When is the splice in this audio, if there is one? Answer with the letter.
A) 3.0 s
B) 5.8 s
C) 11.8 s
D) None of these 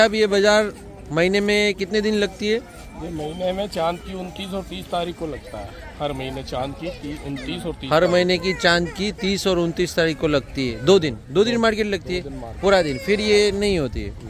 D